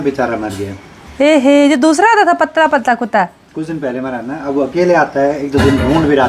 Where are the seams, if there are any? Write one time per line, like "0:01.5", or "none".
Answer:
none